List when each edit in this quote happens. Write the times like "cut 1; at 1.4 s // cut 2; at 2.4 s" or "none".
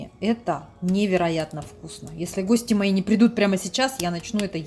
none